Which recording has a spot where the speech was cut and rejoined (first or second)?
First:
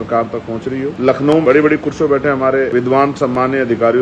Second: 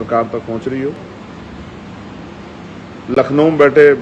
first